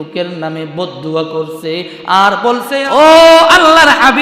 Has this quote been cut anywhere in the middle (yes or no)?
yes